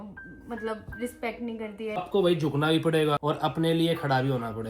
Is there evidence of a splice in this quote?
yes; 2 cuts; at 2.0 s, 3.2 s

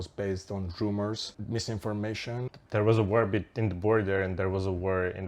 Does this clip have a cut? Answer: yes; 2 cuts; at 1.3 s, 2.5 s

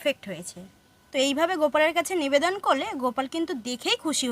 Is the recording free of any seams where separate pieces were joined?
no; 1 cut; at 1.0 s

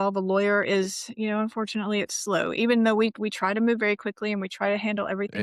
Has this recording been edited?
no; 0 cuts

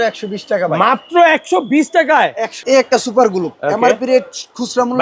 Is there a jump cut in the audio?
yes; 1 cut; at 2.5 s

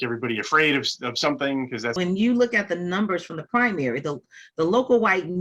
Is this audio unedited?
no; 1 cut; at 1.9 s

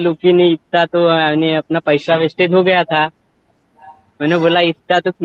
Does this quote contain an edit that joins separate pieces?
no; 0 cuts

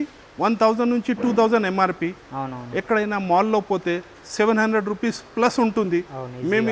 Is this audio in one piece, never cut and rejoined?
yes; 0 cuts

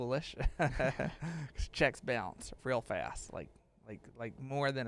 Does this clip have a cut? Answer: no; 0 cuts

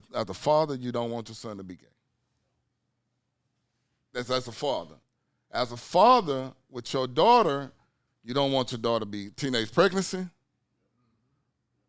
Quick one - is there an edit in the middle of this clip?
no; 0 cuts

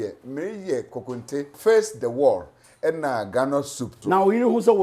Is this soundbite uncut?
no; 2 cuts; at 1.5 s, 4.0 s

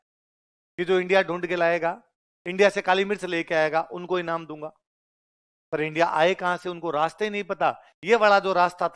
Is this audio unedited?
yes; 0 cuts

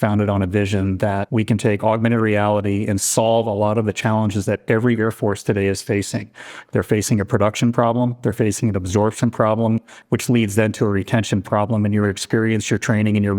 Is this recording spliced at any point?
yes; 1 cut; at 1.3 s

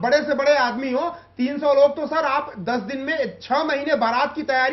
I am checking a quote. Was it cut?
no; 0 cuts

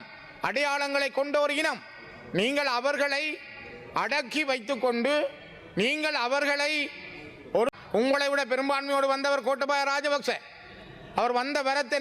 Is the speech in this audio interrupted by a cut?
yes; 1 cut; at 7.7 s

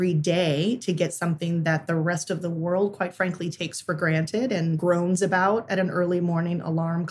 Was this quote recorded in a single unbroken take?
no; 1 cut; at 4.8 s

